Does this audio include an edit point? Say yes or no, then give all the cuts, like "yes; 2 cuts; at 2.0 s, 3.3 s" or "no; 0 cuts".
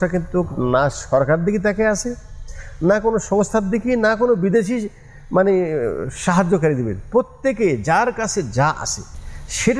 no; 0 cuts